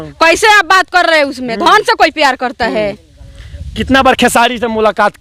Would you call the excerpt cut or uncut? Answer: uncut